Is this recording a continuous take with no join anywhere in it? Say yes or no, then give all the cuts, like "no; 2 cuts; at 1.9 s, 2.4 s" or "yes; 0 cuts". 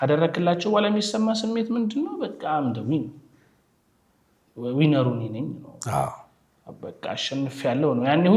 yes; 0 cuts